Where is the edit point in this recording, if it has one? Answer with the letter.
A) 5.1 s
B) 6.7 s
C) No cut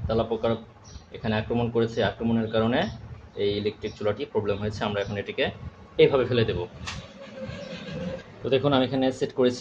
C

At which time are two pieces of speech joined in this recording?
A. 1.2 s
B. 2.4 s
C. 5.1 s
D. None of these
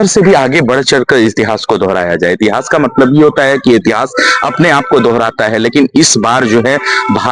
D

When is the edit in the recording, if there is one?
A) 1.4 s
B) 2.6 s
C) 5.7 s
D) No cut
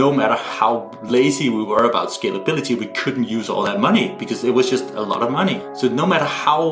C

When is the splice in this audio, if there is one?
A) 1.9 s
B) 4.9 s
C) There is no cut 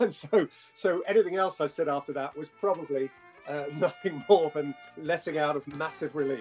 B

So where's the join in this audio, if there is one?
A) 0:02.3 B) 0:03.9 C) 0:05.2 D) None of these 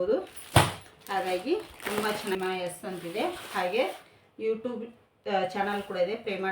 A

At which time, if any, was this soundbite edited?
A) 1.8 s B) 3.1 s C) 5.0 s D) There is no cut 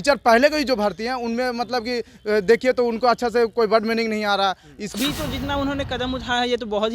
C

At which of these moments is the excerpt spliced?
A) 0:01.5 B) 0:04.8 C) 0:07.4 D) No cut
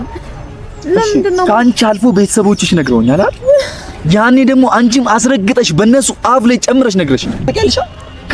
C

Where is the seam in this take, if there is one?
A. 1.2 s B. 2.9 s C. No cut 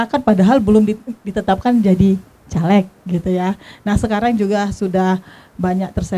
C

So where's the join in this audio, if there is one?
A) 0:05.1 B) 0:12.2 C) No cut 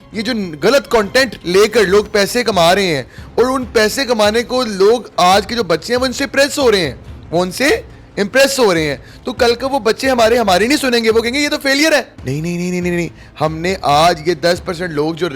B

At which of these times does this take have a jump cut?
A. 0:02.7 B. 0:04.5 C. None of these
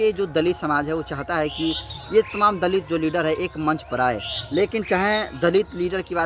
C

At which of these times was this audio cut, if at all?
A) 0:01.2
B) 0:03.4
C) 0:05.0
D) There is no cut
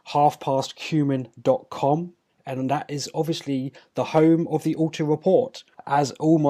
A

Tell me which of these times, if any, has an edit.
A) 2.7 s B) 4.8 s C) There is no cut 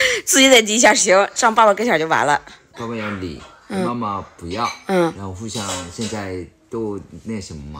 A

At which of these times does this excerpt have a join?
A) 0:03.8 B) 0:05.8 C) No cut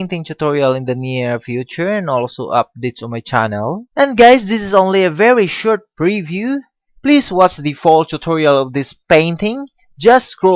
A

